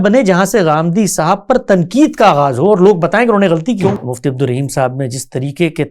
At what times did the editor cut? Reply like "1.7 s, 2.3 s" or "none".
4.0 s